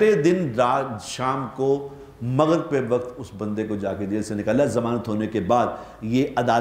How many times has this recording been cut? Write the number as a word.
zero